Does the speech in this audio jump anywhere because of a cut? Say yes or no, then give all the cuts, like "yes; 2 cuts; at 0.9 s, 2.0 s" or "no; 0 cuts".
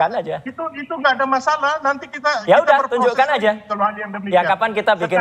no; 0 cuts